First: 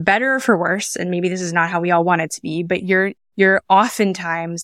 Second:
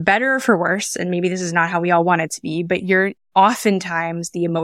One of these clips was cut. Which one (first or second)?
second